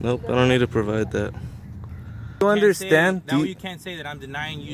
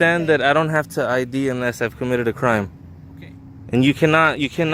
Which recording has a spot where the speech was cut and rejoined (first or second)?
first